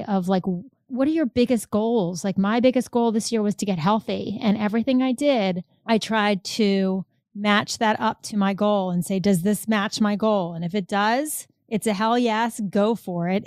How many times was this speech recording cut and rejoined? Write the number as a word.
one